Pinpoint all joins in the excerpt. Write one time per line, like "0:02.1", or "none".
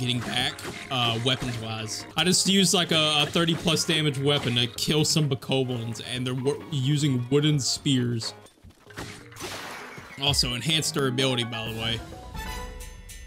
0:02.0
0:08.4